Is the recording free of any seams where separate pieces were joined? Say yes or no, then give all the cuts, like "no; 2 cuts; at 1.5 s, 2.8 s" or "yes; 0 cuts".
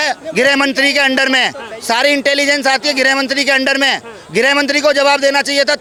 yes; 0 cuts